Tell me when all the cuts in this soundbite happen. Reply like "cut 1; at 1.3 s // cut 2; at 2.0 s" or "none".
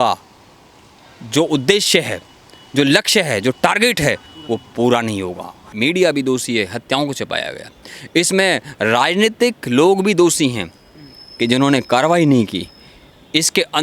cut 1; at 5.7 s